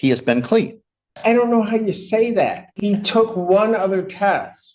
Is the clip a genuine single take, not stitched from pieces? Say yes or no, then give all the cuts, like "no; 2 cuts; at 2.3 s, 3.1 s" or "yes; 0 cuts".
no; 2 cuts; at 1.2 s, 2.7 s